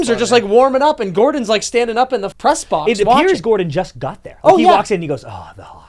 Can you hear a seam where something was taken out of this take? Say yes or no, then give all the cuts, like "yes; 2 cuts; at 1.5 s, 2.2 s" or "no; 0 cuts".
yes; 1 cut; at 2.3 s